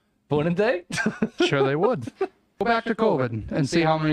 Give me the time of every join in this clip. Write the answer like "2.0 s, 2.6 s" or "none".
2.6 s